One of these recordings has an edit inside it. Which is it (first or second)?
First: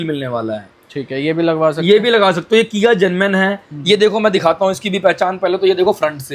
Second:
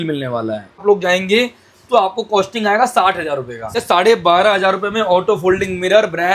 second